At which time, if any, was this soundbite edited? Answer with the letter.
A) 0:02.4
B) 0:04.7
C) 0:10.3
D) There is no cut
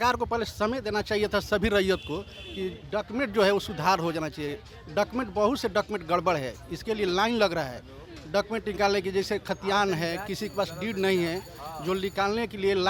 D